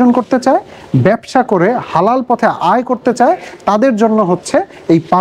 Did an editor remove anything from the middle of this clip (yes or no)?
no